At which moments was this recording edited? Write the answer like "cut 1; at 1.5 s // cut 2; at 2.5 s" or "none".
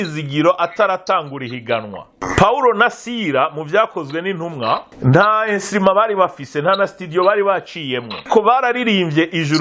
cut 1; at 2.2 s // cut 2; at 4.9 s // cut 3; at 8.2 s